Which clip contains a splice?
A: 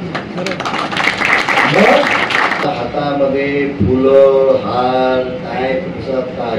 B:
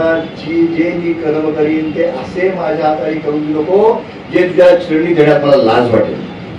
A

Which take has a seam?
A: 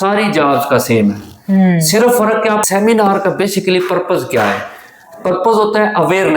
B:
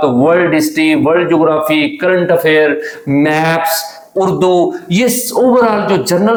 A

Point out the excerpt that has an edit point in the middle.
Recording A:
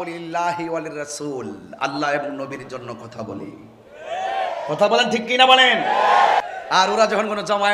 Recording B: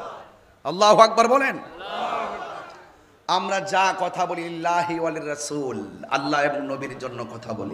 A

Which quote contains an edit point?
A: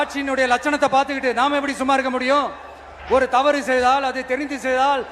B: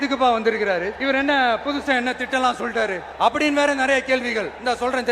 B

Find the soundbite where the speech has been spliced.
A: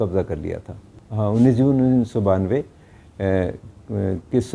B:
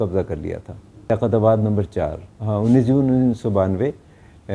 A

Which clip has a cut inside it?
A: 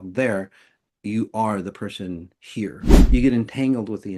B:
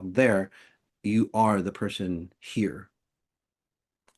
A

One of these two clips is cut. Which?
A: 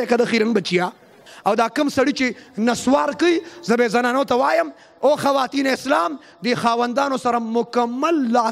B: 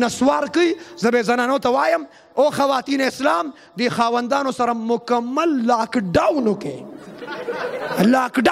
A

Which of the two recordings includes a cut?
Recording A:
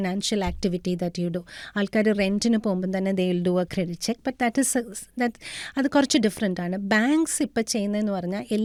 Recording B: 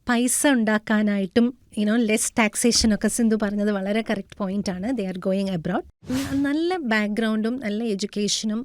B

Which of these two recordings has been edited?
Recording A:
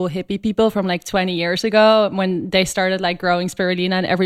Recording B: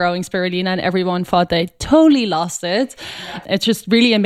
B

